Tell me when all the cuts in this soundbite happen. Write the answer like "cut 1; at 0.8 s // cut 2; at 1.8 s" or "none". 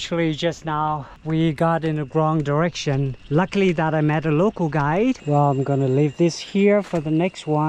cut 1; at 1.1 s // cut 2; at 3.2 s // cut 3; at 5.2 s